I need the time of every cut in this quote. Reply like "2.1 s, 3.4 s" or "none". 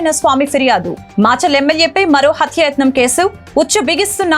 none